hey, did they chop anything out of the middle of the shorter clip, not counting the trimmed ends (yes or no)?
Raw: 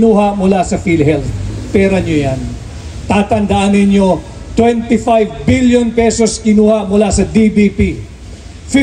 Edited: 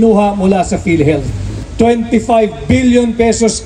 yes